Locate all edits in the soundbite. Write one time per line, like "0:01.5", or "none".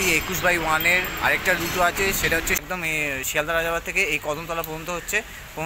0:02.6